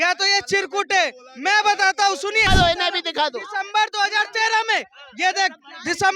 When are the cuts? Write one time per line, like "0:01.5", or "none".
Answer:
0:02.5